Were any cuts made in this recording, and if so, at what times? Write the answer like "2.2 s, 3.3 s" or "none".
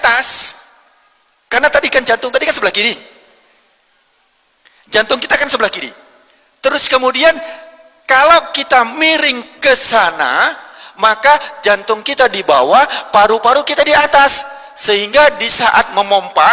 none